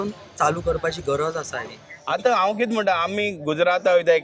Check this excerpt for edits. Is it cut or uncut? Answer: cut